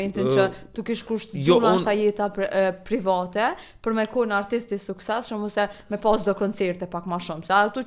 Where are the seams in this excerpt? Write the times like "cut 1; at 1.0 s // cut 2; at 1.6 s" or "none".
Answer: none